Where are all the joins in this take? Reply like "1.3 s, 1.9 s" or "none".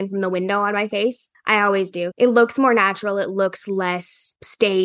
1.8 s